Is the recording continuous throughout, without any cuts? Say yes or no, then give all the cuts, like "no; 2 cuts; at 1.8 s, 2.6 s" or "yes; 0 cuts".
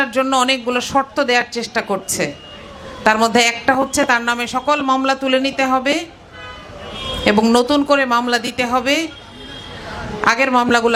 yes; 0 cuts